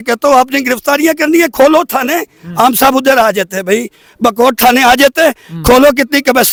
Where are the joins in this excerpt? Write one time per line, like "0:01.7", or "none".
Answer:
none